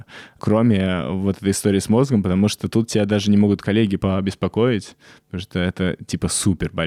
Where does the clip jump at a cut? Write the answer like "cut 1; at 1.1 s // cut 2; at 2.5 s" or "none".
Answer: none